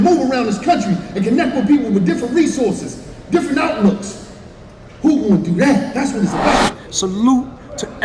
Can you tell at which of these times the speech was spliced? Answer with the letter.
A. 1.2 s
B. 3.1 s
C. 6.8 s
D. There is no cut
C